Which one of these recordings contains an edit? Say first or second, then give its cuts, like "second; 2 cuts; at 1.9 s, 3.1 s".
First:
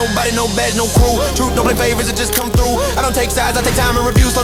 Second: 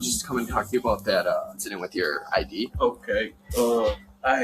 second; 2 cuts; at 1.6 s, 2.7 s